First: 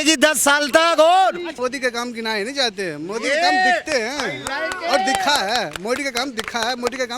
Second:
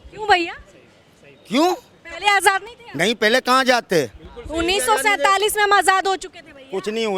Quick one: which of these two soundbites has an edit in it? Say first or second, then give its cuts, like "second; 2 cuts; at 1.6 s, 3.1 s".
first; 1 cut; at 1.5 s